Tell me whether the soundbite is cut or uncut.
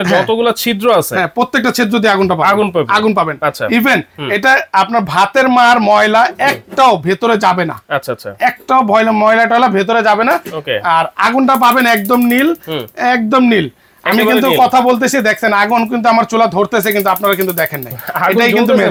uncut